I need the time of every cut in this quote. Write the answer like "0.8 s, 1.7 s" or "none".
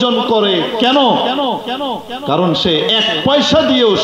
none

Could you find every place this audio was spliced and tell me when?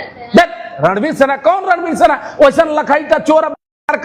none

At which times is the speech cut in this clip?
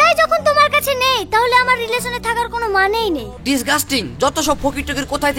3.3 s

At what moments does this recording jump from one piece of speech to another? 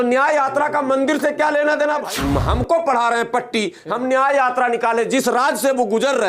2.1 s

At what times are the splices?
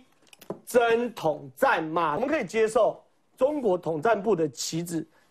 2.2 s

